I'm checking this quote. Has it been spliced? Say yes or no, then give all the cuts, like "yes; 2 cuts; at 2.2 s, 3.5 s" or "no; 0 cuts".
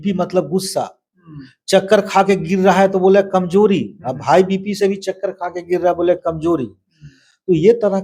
no; 0 cuts